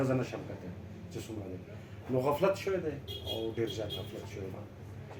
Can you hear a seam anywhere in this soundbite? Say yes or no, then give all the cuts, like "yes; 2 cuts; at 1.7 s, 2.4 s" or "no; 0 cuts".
no; 0 cuts